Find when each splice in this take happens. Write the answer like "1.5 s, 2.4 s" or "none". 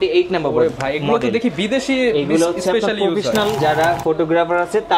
3.6 s